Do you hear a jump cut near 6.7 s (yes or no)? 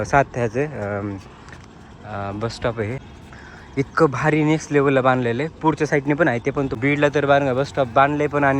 yes